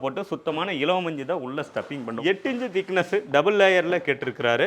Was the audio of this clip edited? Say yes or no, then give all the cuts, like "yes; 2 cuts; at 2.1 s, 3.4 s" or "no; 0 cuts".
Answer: yes; 1 cut; at 2.2 s